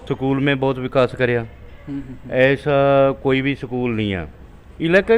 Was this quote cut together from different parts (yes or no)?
no